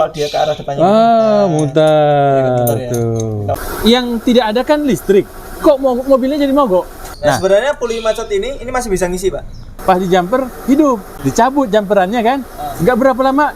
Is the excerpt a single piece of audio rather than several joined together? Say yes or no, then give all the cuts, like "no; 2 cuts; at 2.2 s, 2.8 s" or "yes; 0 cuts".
no; 4 cuts; at 3.5 s, 7.1 s, 9.7 s, 11.1 s